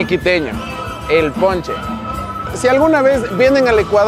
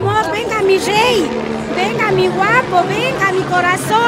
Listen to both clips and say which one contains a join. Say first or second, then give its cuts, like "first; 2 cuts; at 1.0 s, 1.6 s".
first; 1 cut; at 2.4 s